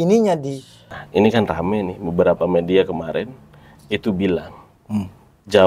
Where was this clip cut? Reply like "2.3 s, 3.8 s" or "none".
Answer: 1.0 s